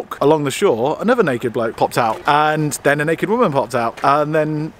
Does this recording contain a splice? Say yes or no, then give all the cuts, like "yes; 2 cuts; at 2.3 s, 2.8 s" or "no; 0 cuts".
no; 0 cuts